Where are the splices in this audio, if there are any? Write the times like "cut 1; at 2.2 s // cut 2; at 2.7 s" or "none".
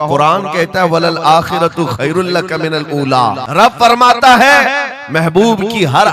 cut 1; at 3.4 s